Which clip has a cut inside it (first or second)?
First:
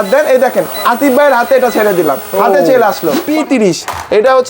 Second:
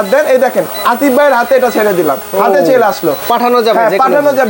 first